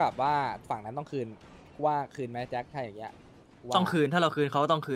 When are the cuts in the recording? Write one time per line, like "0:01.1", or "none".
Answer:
none